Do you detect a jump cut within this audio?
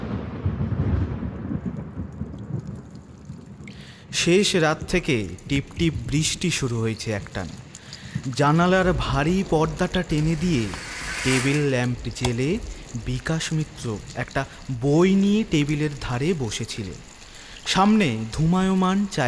yes; 1 cut; at 4.2 s

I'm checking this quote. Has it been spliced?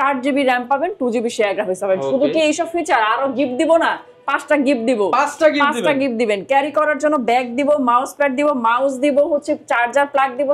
no; 0 cuts

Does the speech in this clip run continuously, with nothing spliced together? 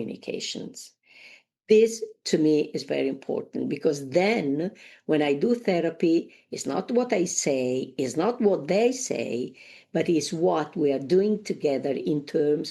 no; 1 cut; at 10.7 s

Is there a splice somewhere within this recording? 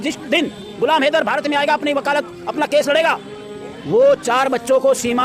no; 0 cuts

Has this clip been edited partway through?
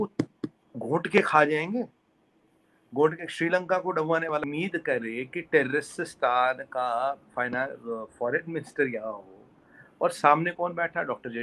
yes; 1 cut; at 4.4 s

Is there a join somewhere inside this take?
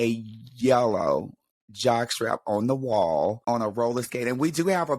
yes; 1 cut; at 3.4 s

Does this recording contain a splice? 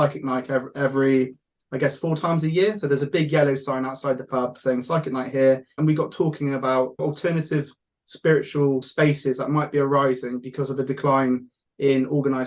yes; 3 cuts; at 5.7 s, 7.0 s, 8.9 s

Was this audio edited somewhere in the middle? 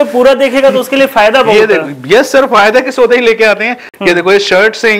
no; 0 cuts

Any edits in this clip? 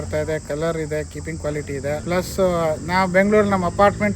yes; 1 cut; at 2.0 s

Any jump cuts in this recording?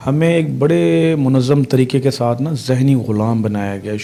no; 0 cuts

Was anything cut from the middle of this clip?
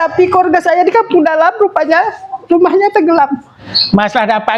yes; 1 cut; at 3.5 s

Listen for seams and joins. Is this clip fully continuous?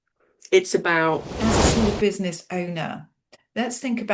no; 1 cut; at 1.3 s

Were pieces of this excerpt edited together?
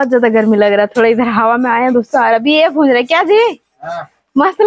no; 0 cuts

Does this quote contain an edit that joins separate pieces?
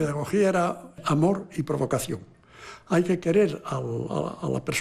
yes; 1 cut; at 1.0 s

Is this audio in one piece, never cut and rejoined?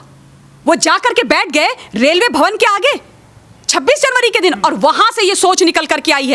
yes; 0 cuts

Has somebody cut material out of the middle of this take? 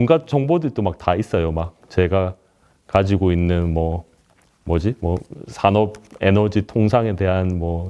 no; 0 cuts

